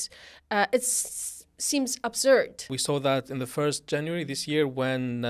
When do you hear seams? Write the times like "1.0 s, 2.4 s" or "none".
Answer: 2.7 s